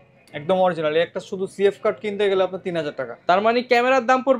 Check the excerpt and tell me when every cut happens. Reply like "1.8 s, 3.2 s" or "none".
none